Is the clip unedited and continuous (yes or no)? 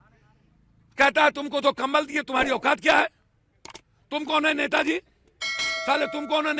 yes